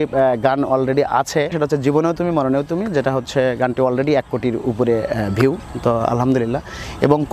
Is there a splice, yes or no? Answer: yes